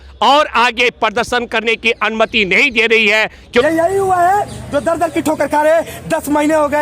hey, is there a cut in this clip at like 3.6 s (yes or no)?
yes